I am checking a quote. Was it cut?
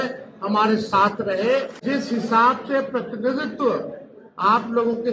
yes; 1 cut; at 1.8 s

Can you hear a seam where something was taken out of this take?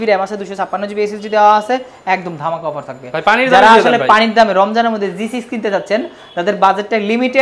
no; 0 cuts

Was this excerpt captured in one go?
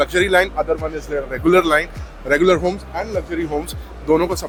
yes; 0 cuts

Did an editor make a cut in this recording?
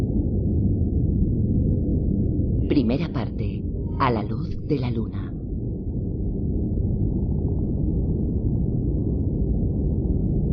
yes; 1 cut; at 4.0 s

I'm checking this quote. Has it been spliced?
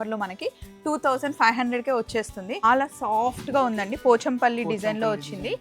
yes; 1 cut; at 2.6 s

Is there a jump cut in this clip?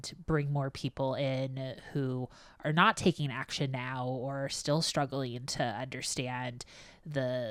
no; 0 cuts

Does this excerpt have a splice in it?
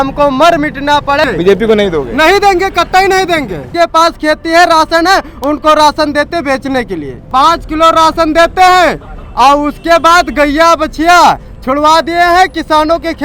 yes; 3 cuts; at 1.2 s, 3.7 s, 7.1 s

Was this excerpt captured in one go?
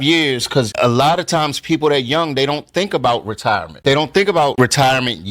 no; 1 cut; at 3.7 s

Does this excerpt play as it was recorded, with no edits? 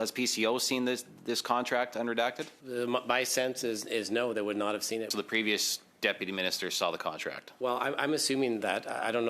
no; 3 cuts; at 2.5 s, 5.1 s, 7.5 s

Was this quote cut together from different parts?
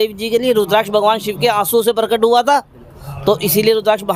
no; 0 cuts

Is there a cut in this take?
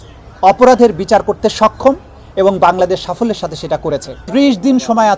yes; 1 cut; at 4.2 s

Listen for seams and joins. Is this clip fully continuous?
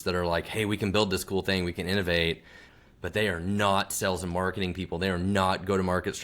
no; 1 cut; at 2.7 s

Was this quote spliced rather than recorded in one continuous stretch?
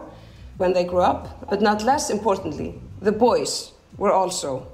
yes; 1 cut; at 1.5 s

